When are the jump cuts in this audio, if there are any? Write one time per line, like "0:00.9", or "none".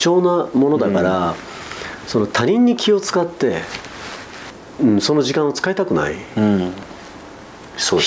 none